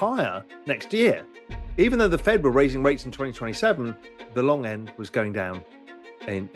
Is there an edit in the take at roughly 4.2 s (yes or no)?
yes